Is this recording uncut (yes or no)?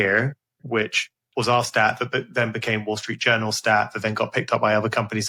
yes